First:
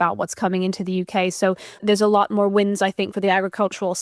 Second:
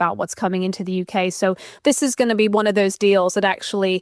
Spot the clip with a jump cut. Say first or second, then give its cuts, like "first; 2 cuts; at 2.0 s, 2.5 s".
first; 1 cut; at 1.8 s